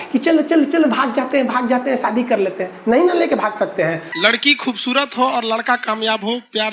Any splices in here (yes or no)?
yes